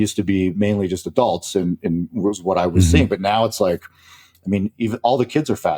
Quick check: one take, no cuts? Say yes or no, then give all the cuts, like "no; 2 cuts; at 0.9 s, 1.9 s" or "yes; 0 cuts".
yes; 0 cuts